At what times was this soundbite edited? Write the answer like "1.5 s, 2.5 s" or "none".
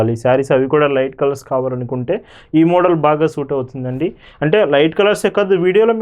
none